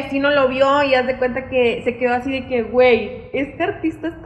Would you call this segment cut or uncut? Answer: uncut